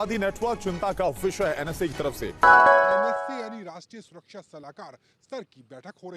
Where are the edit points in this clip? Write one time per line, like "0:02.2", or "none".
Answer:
0:02.3
0:03.3